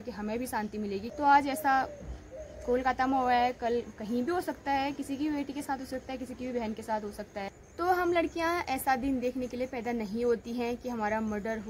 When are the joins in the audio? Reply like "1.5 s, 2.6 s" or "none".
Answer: 1.1 s, 7.6 s